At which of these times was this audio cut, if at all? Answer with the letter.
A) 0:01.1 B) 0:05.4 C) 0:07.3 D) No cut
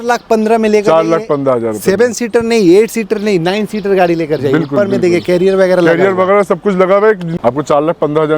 C